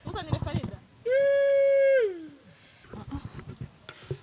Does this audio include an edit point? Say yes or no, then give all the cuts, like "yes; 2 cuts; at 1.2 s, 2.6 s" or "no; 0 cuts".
yes; 1 cut; at 2.8 s